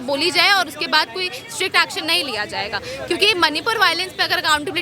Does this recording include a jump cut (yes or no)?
no